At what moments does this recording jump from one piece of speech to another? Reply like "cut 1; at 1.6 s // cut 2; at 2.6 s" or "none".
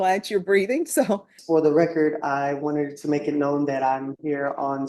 cut 1; at 1.3 s